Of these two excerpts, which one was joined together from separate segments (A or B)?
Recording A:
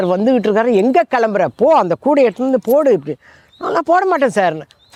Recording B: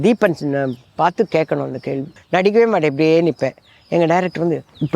B